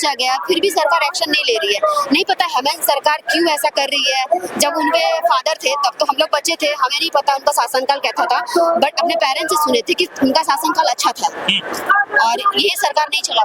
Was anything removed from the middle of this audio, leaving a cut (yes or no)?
no